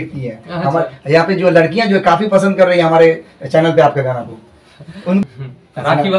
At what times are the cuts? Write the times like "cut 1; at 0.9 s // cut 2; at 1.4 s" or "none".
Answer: cut 1; at 5.2 s